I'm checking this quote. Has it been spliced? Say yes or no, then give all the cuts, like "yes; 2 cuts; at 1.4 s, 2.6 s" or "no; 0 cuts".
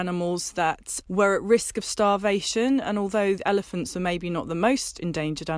yes; 1 cut; at 0.9 s